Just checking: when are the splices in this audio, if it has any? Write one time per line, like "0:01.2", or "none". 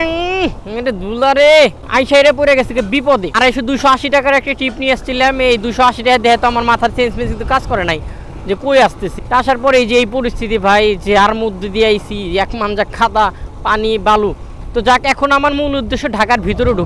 none